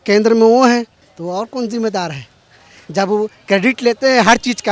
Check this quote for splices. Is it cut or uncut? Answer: cut